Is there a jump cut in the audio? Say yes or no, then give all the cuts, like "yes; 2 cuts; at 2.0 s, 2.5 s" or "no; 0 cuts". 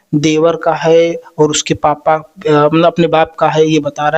no; 0 cuts